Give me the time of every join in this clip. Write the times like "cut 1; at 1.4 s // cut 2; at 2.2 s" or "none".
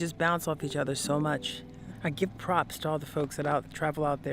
cut 1; at 1.9 s